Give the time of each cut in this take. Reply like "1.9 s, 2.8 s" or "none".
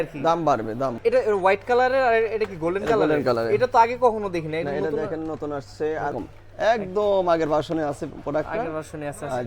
1.0 s, 6.1 s